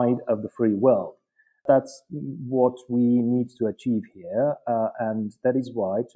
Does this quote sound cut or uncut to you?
cut